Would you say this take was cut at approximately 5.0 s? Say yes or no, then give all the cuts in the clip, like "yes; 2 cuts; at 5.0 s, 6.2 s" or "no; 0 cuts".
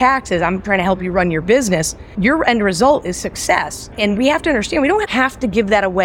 no; 2 cuts; at 2.2 s, 3.8 s